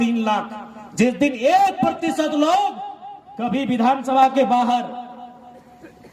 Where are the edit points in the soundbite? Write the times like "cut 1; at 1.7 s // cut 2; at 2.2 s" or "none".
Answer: none